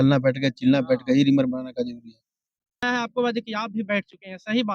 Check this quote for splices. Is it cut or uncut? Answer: cut